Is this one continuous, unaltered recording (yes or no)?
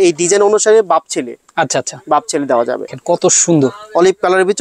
no